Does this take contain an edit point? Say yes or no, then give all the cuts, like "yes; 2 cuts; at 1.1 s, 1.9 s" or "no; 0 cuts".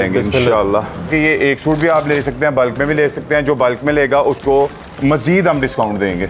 yes; 1 cut; at 1.1 s